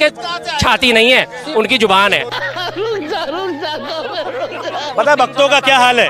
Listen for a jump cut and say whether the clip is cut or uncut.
cut